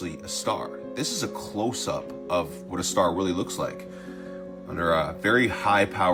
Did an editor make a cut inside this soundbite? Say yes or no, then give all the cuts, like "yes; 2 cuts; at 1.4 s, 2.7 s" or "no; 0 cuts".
no; 0 cuts